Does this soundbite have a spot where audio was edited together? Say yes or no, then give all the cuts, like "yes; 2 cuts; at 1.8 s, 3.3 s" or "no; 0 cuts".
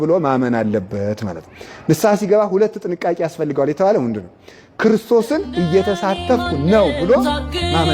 no; 0 cuts